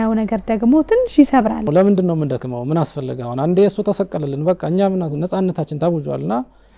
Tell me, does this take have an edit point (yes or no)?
yes